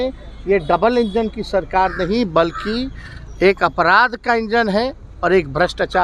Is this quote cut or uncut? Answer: uncut